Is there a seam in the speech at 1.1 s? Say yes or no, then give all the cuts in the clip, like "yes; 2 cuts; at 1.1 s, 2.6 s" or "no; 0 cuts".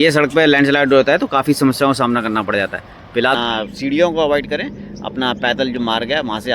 no; 1 cut; at 3.3 s